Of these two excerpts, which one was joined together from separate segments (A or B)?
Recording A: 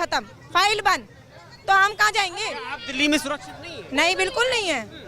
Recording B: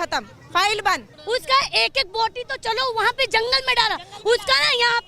B